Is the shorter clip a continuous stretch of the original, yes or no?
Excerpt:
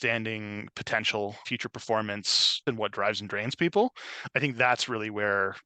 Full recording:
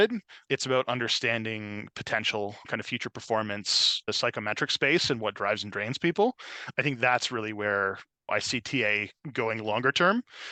no